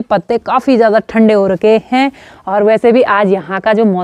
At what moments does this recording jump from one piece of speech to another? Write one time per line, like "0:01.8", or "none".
none